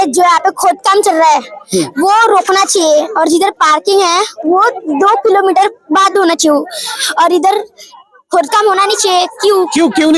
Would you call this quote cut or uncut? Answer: uncut